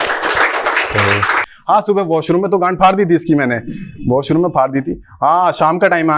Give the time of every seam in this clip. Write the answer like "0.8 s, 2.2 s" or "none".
1.5 s